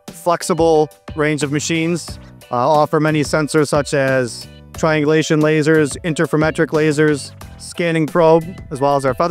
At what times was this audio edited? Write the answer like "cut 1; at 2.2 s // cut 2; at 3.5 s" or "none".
none